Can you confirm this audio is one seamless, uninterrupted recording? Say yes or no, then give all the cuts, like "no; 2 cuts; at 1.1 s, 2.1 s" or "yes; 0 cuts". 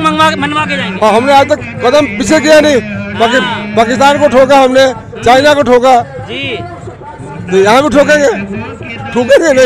yes; 0 cuts